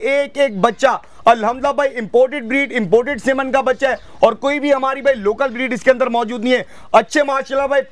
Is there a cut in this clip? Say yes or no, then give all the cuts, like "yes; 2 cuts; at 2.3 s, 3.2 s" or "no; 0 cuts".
no; 0 cuts